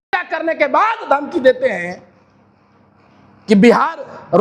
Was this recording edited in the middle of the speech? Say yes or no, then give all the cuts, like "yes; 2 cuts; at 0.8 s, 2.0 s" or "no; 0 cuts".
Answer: no; 0 cuts